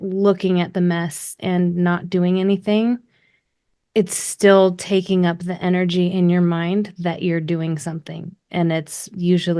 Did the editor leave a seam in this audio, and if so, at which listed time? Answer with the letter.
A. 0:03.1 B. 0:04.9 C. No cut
C